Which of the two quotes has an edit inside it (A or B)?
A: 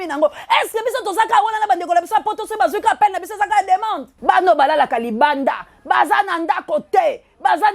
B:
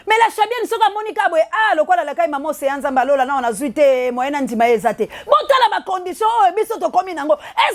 A